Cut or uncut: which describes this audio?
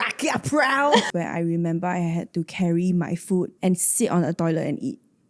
cut